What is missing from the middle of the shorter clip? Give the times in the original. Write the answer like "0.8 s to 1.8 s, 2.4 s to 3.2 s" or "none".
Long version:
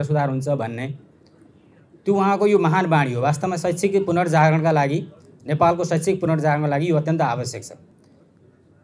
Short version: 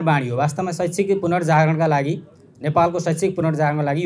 none